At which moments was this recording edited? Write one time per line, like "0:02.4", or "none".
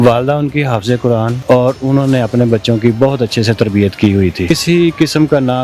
0:01.4
0:04.5